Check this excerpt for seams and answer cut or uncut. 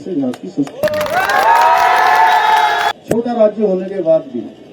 cut